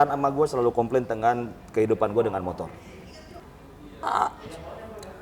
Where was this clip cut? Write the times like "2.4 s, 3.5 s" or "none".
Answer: 3.4 s